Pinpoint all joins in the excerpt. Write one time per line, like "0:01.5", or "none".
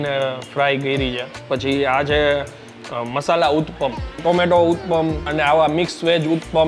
0:01.3
0:04.2
0:05.3